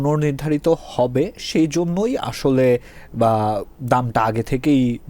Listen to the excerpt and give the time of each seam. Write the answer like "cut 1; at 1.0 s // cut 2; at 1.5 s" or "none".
none